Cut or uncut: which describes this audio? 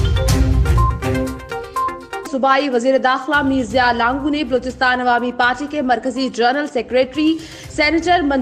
cut